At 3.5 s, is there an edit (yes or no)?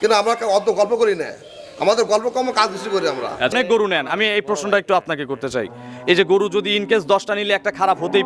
yes